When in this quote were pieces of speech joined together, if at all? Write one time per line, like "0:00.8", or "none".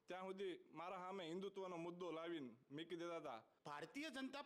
0:03.5